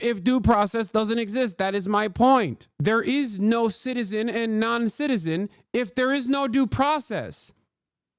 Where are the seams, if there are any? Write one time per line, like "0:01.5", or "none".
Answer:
0:02.6